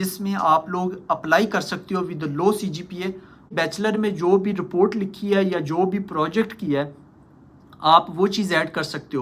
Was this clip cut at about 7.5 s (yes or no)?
no